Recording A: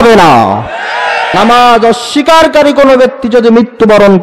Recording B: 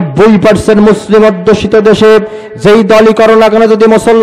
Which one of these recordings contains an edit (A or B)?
A